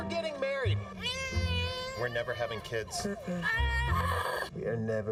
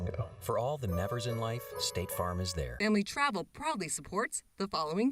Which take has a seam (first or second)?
second